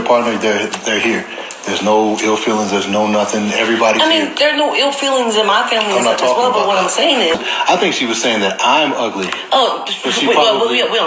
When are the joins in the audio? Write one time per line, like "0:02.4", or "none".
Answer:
0:07.4